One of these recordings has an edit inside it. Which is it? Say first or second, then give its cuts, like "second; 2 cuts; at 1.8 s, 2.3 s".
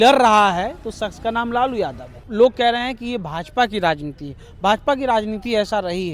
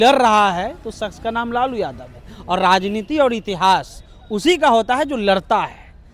first; 1 cut; at 2.2 s